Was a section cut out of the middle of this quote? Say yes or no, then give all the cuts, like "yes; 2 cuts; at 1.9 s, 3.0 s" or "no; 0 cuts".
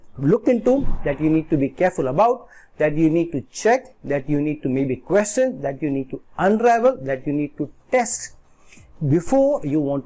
no; 0 cuts